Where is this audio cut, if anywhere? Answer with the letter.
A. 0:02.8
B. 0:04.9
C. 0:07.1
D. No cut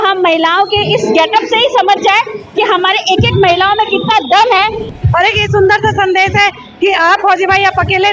B